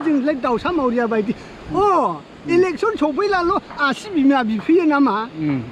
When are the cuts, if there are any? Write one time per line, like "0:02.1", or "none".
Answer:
none